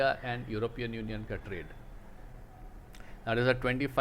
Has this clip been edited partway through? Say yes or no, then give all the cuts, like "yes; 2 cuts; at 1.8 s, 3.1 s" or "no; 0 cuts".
no; 0 cuts